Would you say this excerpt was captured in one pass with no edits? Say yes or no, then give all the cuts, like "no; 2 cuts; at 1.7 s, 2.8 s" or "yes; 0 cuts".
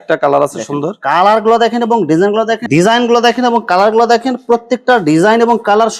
no; 1 cut; at 2.6 s